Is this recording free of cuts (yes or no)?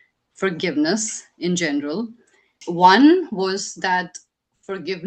no